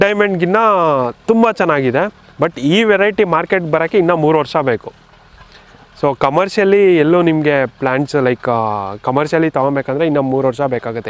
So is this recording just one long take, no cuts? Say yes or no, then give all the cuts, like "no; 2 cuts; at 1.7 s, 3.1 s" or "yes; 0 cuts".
yes; 0 cuts